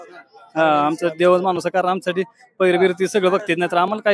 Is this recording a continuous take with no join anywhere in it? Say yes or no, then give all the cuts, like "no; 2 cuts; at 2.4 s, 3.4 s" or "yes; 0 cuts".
yes; 0 cuts